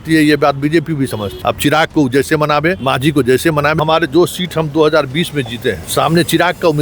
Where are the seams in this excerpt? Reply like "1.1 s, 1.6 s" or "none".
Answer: 1.3 s, 2.8 s, 3.8 s, 5.8 s

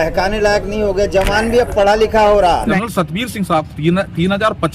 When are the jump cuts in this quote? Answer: 2.8 s

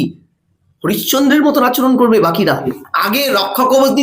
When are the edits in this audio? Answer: 2.8 s

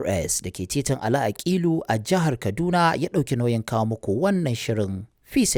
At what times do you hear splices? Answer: none

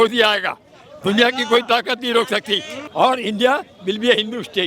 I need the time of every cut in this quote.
2.9 s

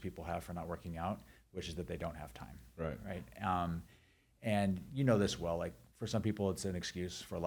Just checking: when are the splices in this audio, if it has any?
none

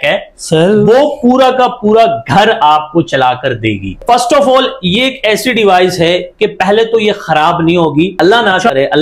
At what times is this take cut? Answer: 4.0 s, 8.1 s

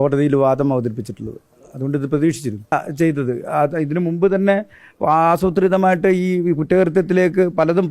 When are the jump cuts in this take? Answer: 2.7 s

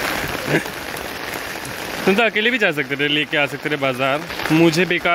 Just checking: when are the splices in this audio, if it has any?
none

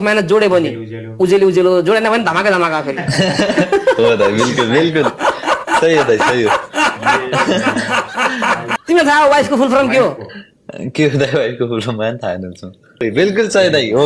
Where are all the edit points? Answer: 8.7 s, 13.0 s

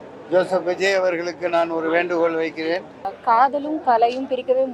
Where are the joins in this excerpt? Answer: 3.1 s

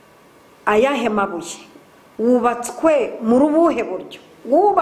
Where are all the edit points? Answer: none

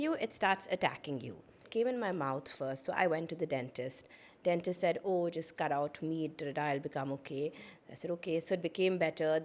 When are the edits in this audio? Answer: 1.7 s

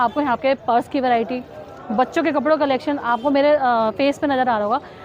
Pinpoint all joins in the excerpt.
none

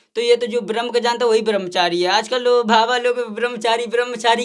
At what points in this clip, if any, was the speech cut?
none

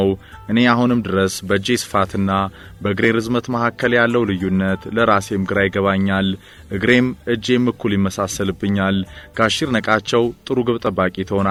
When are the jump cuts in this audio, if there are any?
none

